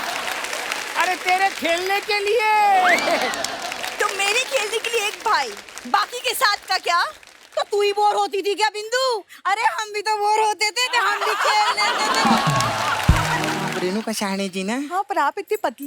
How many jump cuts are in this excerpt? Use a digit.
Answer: 1